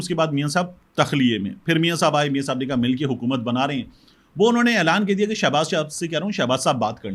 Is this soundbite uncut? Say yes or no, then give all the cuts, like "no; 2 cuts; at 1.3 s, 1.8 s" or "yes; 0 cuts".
yes; 0 cuts